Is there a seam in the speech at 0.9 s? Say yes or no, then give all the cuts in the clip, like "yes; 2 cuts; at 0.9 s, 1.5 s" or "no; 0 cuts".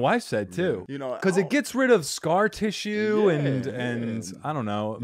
yes; 1 cut; at 0.9 s